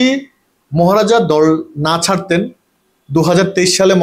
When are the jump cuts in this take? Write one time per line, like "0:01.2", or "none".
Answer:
none